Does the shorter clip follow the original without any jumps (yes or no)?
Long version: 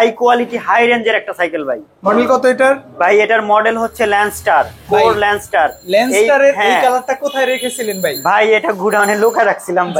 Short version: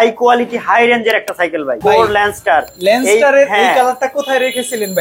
no